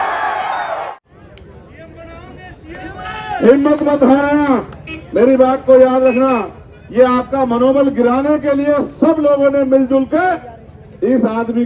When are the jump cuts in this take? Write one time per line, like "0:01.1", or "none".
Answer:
0:00.9